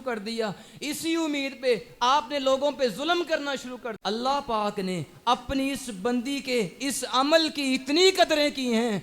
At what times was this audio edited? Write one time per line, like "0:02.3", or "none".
0:03.9